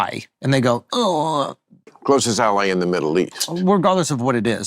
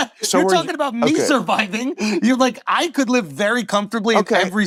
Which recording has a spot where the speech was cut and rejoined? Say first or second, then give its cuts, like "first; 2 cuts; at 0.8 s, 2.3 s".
first; 1 cut; at 1.9 s